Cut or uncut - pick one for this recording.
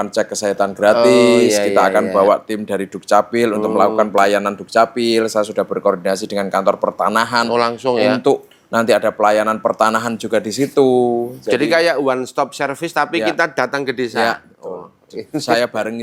uncut